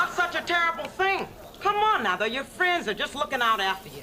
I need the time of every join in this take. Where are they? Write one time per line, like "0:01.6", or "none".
0:01.4